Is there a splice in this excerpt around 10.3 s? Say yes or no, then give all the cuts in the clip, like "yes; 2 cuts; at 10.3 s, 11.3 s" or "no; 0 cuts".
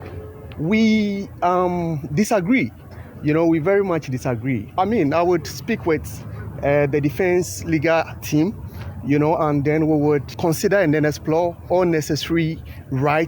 yes; 3 cuts; at 4.7 s, 10.3 s, 11.6 s